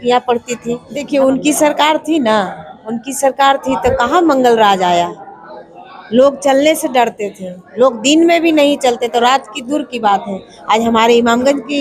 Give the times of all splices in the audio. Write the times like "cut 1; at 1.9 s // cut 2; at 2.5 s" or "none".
cut 1; at 0.9 s